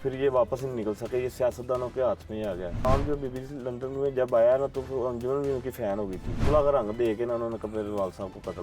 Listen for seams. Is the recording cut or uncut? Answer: cut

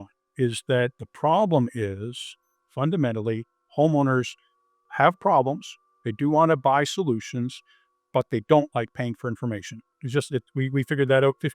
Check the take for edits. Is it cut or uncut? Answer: cut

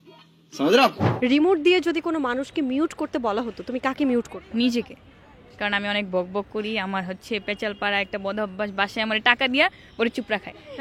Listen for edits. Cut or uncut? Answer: cut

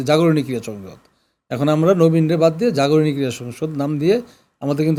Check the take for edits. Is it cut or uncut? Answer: uncut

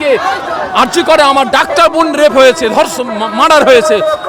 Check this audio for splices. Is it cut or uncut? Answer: uncut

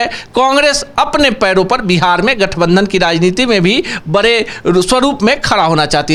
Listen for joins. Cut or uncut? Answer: uncut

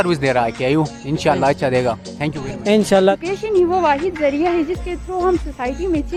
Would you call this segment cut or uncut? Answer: uncut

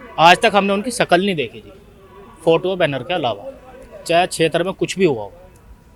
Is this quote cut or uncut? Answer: uncut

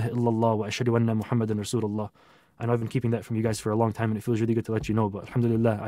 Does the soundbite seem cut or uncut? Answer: uncut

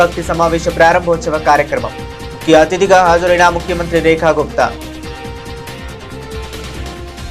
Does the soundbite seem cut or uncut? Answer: cut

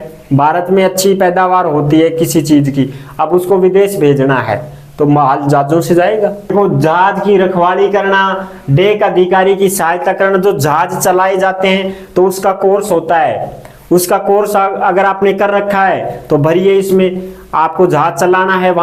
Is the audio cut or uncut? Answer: cut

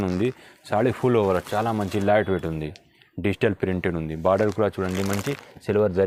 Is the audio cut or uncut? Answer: uncut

